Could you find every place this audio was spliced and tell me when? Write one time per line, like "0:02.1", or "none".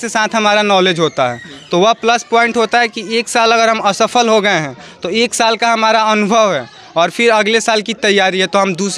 none